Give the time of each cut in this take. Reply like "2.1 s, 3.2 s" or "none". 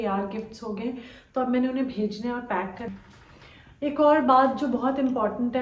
2.9 s